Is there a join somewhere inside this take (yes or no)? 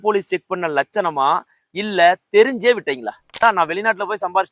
yes